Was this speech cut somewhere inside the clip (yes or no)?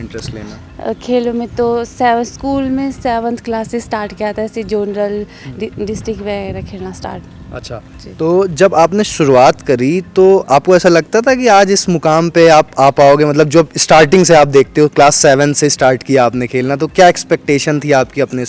no